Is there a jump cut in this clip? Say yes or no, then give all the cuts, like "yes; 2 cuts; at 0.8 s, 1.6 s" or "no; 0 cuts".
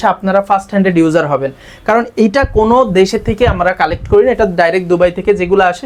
no; 0 cuts